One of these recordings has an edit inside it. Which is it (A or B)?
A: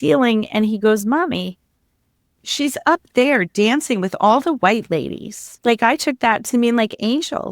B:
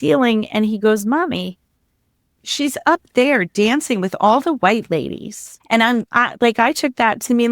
A